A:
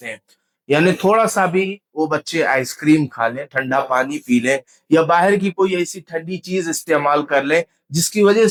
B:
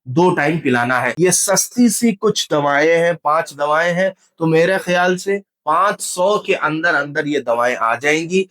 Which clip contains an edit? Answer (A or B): B